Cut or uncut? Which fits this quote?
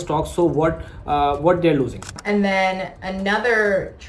cut